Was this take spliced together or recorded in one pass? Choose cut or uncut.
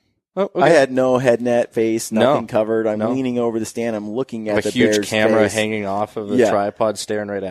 uncut